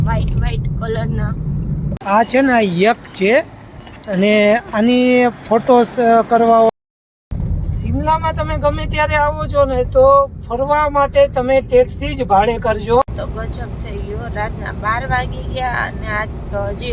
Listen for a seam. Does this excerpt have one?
yes; 3 cuts; at 2.0 s, 6.7 s, 13.2 s

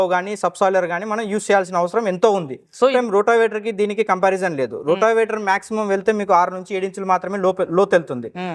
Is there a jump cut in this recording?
yes; 1 cut; at 2.9 s

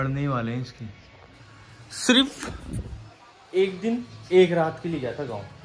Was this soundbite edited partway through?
no; 0 cuts

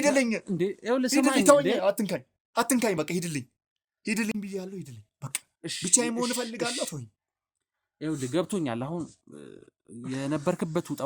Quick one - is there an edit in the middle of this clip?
no; 0 cuts

